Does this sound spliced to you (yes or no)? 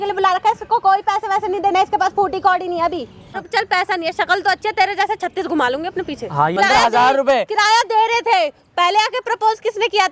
yes